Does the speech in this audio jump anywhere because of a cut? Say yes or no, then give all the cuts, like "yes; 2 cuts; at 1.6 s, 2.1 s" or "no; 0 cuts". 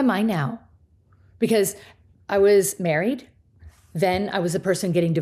no; 0 cuts